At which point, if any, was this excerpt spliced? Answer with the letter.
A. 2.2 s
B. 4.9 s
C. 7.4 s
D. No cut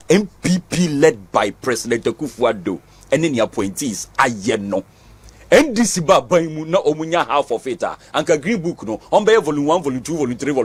D